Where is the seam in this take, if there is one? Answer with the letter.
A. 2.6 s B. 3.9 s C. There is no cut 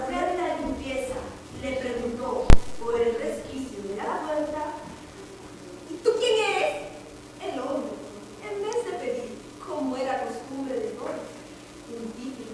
A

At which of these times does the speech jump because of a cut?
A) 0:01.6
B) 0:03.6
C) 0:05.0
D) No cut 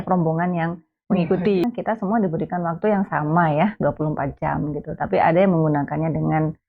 A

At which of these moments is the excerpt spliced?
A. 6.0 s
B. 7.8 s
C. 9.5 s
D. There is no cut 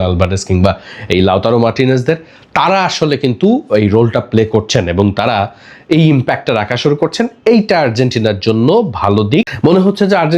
C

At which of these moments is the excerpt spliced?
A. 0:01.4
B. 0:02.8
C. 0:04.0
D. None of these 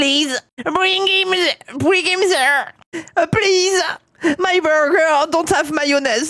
B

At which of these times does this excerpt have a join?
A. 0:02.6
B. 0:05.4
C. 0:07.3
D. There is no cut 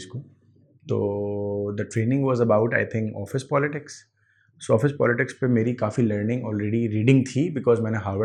D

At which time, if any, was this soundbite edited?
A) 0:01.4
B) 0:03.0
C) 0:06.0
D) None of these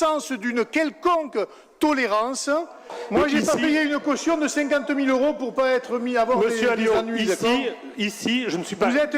B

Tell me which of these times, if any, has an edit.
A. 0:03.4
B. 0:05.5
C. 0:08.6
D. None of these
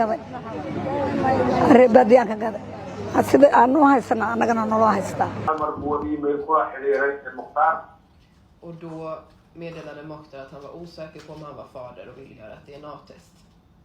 B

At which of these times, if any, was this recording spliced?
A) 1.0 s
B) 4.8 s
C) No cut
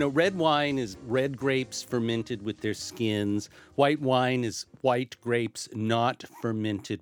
A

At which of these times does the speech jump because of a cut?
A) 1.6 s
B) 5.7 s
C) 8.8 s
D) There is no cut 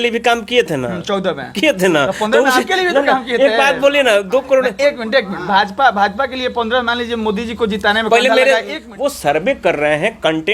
C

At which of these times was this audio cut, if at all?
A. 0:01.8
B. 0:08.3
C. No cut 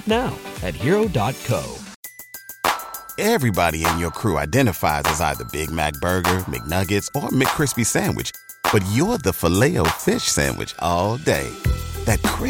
A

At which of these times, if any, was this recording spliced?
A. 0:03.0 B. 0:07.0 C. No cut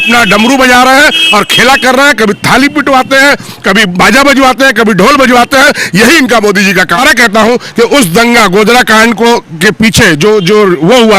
B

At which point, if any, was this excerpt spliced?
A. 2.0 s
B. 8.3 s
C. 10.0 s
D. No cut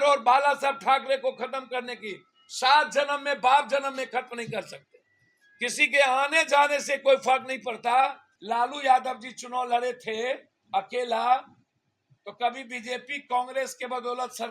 B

